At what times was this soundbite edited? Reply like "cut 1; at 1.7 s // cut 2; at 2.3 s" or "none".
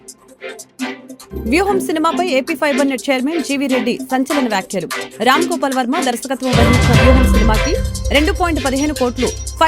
cut 1; at 1.1 s